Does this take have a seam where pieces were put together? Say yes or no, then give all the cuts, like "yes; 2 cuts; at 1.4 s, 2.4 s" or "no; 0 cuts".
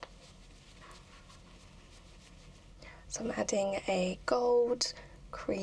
yes; 1 cut; at 2.8 s